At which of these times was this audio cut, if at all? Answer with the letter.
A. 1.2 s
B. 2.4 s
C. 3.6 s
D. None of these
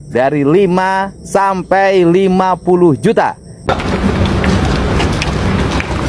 C